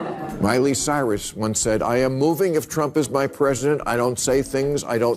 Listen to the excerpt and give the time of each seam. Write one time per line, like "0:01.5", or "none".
none